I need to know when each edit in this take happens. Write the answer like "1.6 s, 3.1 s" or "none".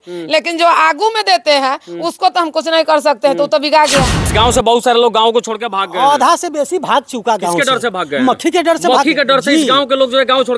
4.2 s